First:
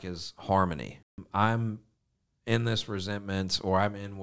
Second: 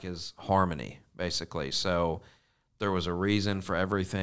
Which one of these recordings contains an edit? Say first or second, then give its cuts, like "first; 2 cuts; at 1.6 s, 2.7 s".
first; 1 cut; at 1.2 s